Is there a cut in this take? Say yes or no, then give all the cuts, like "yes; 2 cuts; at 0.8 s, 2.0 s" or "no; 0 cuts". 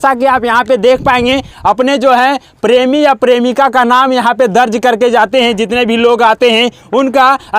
no; 0 cuts